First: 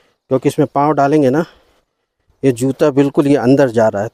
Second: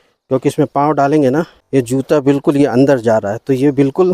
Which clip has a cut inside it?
second; 1 cut; at 1.6 s

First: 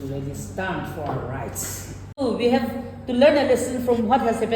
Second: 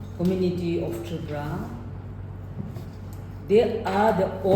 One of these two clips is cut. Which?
first; 1 cut; at 2.2 s

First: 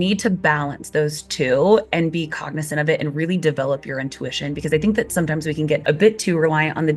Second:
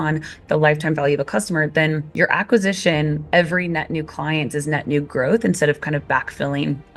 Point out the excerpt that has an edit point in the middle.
first; 1 cut; at 5.8 s

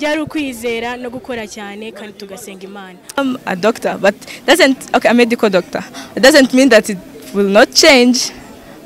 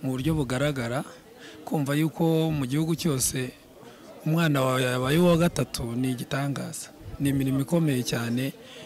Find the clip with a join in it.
first; 1 cut; at 3.2 s

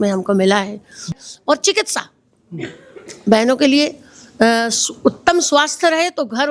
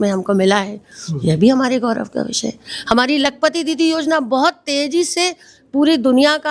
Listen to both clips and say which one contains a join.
first; 1 cut; at 1.2 s

